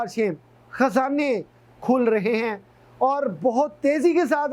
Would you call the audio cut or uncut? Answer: uncut